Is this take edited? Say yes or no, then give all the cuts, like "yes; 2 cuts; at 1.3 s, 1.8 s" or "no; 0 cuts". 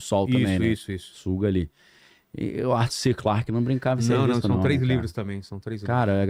no; 0 cuts